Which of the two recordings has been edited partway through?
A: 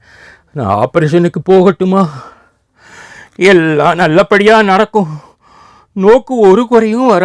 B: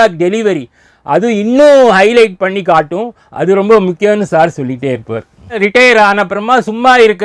B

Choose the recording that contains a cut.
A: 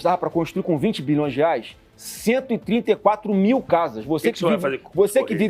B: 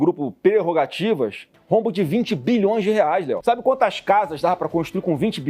B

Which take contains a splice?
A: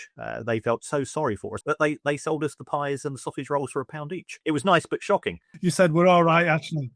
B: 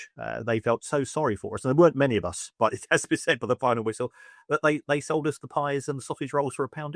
A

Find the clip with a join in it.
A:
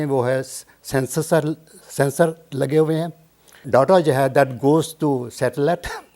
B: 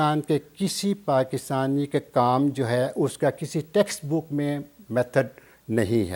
A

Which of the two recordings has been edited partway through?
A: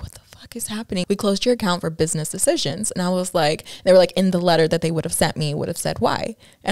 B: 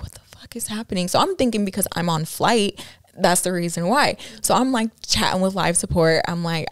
A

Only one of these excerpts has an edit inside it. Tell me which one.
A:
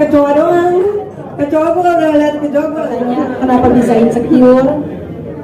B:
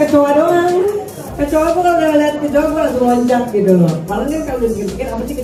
A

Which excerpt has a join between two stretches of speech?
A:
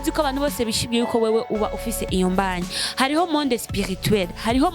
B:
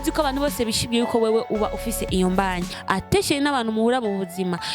B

